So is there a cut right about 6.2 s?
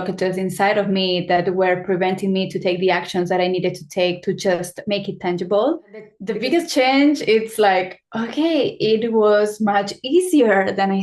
yes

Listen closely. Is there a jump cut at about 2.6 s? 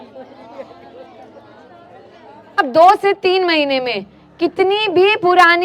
yes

